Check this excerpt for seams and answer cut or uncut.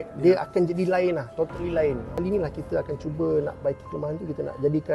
cut